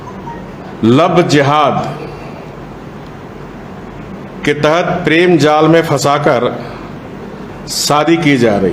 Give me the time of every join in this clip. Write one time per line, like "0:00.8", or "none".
none

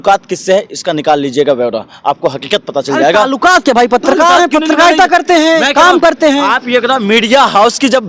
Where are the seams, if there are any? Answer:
none

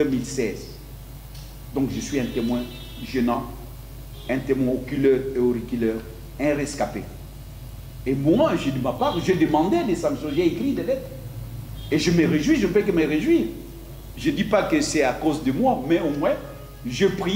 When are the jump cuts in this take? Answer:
none

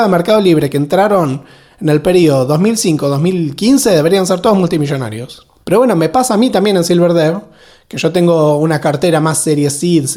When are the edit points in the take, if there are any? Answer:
none

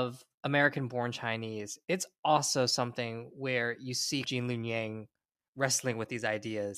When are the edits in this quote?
0:04.3

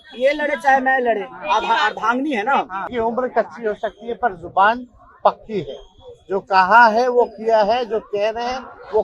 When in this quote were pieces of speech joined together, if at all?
0:02.8

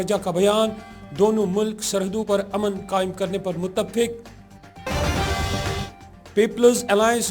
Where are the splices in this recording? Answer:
0:02.3

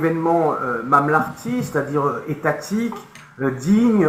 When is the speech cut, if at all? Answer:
none

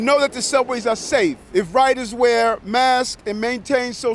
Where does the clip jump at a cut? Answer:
0:01.4

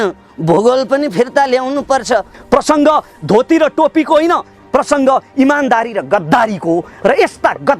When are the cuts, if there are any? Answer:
0:02.3

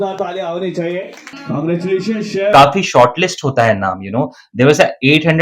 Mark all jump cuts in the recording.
0:01.3
0:02.5

